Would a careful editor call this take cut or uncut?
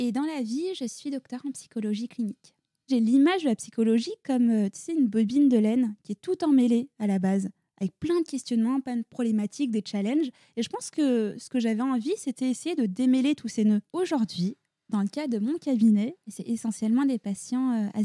cut